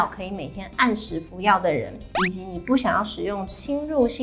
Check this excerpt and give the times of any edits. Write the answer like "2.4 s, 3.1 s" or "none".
none